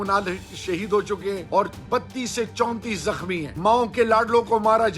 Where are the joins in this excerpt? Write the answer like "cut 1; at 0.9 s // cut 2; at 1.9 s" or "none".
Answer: cut 1; at 1.4 s // cut 2; at 3.5 s